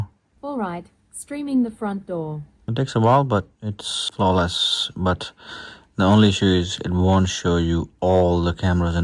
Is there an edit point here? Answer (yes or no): no